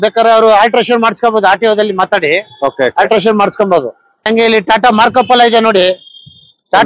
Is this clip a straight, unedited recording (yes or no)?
no